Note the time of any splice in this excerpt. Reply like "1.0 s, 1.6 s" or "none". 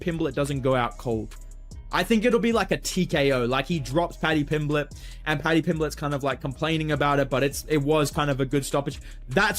7.8 s